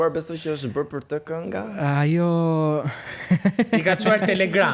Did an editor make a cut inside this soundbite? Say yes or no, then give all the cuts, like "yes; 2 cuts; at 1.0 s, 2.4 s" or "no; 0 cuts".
no; 0 cuts